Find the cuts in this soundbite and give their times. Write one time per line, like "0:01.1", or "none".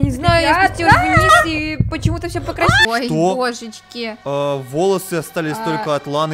0:02.8